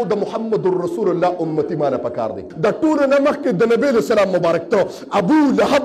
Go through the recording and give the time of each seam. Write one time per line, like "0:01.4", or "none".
0:02.5